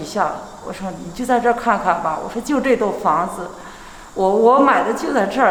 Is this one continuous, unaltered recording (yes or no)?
yes